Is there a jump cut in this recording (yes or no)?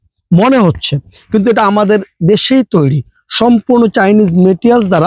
no